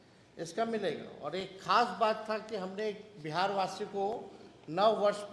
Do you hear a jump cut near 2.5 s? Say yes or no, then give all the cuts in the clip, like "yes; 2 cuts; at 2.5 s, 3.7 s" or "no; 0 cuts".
no; 1 cut; at 4.1 s